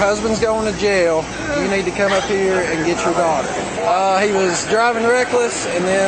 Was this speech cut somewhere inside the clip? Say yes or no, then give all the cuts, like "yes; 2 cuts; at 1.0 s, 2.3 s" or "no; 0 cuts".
yes; 1 cut; at 3.7 s